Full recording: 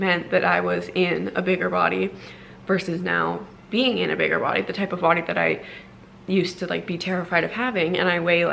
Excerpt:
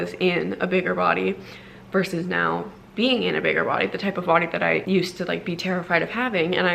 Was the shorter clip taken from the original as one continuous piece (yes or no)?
no